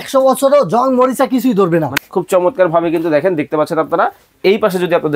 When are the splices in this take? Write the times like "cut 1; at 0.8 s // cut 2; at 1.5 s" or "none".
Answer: cut 1; at 2.0 s